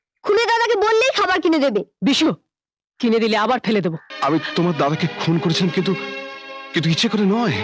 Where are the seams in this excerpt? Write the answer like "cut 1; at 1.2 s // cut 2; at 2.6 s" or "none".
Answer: cut 1; at 4.1 s